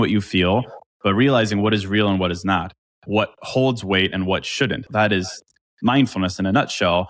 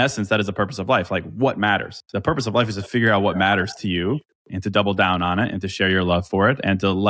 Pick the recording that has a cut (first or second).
first